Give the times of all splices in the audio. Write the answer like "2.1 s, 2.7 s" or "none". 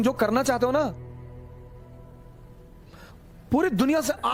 none

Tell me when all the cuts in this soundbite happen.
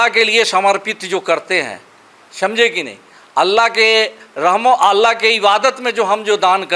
none

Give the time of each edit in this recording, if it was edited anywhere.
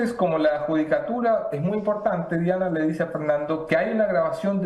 none

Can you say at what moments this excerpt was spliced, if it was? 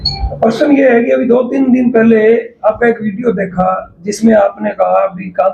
none

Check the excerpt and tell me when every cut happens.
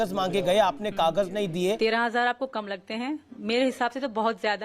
1.8 s

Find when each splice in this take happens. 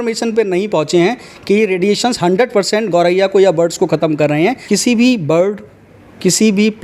4.6 s

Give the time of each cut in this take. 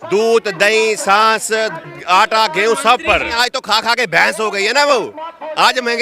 3.4 s

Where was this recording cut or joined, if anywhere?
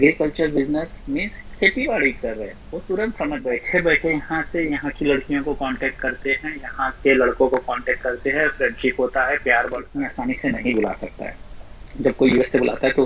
3.6 s, 9.9 s

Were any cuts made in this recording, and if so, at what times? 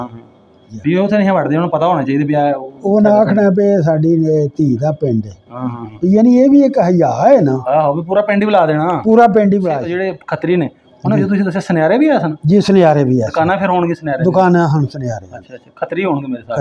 9.9 s

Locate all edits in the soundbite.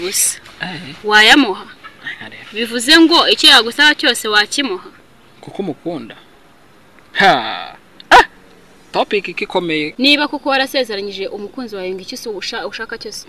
9.9 s

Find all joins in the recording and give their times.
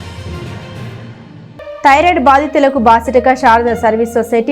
1.2 s

